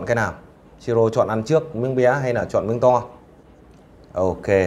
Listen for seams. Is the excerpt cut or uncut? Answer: uncut